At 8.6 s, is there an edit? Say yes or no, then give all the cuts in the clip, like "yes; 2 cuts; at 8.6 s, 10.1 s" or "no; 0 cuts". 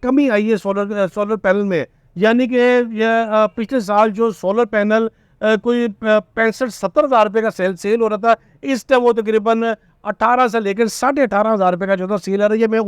no; 0 cuts